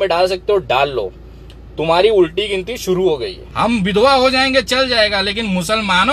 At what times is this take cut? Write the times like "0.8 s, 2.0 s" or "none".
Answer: 3.4 s